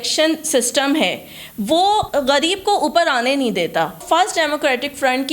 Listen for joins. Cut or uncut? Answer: cut